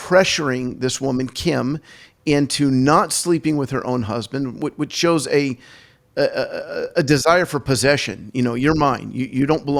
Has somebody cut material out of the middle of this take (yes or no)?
no